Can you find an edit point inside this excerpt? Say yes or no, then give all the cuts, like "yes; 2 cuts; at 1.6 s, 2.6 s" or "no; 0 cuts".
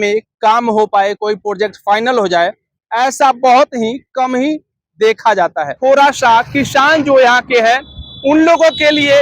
yes; 1 cut; at 5.7 s